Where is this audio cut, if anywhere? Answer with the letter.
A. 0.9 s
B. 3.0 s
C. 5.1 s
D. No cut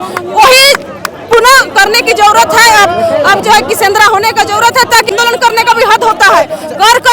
C